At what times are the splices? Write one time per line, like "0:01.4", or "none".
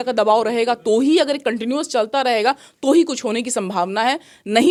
none